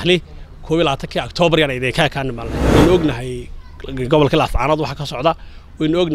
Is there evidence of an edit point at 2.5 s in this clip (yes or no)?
yes